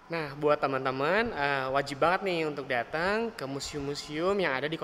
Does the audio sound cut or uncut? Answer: uncut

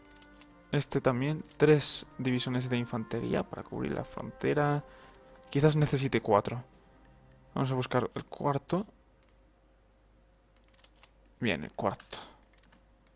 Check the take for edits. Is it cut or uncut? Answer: cut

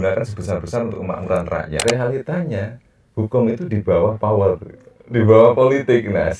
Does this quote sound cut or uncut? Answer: cut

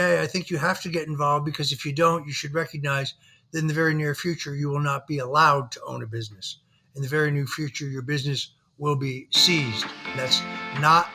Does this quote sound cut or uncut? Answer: cut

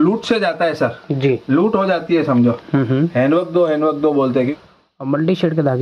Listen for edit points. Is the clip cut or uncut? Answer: cut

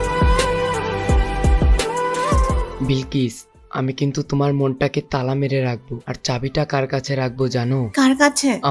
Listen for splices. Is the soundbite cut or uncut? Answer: cut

